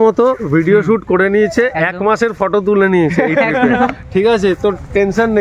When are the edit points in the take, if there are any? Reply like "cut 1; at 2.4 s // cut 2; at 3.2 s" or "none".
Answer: cut 1; at 1.8 s // cut 2; at 4.5 s